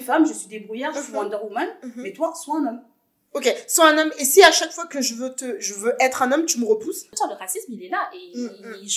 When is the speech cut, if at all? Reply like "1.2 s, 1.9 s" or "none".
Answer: 7.0 s